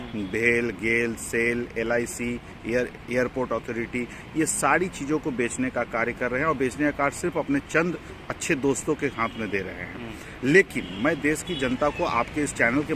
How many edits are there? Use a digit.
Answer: 0